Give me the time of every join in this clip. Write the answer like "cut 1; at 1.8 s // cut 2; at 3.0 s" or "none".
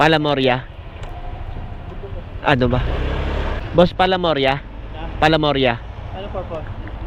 cut 1; at 3.6 s